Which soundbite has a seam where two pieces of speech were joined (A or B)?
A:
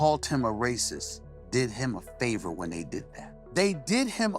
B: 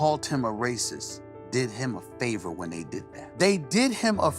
B